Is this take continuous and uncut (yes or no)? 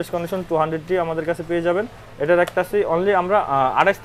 yes